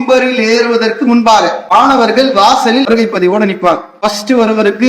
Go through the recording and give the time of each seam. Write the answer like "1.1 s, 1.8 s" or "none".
1.7 s, 2.9 s, 3.9 s